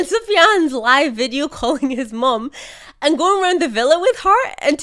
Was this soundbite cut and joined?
no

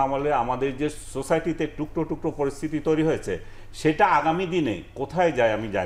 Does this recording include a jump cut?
no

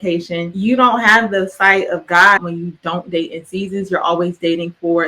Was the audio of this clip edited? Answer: yes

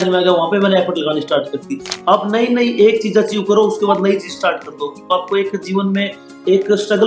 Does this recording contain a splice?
no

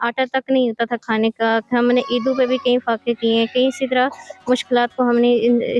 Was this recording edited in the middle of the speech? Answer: no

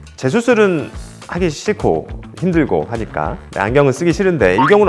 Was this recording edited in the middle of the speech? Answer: no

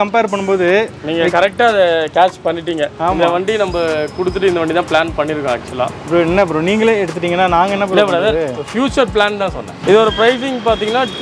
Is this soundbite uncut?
no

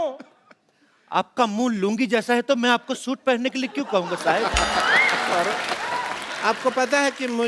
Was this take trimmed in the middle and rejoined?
yes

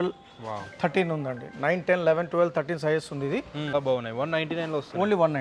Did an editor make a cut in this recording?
yes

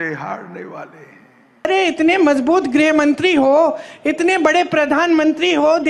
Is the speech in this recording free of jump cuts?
no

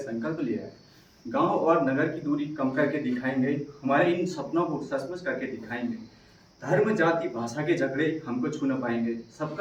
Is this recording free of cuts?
yes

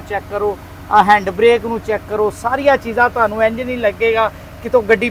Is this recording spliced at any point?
no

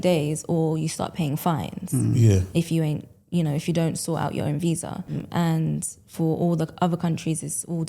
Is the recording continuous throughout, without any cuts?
no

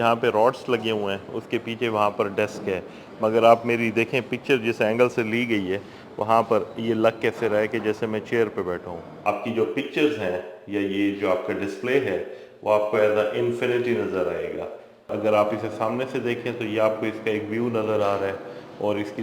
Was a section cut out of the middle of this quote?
yes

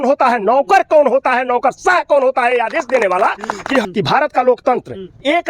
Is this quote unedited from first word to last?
no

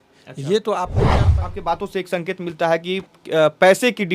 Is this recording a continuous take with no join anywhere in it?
no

